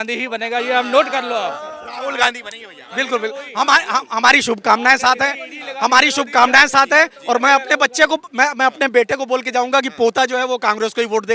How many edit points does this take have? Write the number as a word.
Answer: zero